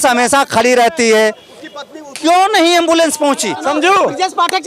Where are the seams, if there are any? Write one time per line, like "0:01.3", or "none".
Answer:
0:03.6